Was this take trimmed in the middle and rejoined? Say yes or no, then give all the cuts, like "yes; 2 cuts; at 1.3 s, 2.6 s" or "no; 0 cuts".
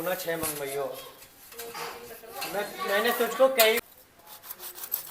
yes; 1 cut; at 3.8 s